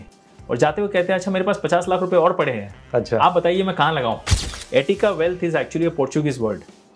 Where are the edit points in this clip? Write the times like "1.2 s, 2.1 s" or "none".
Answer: 4.3 s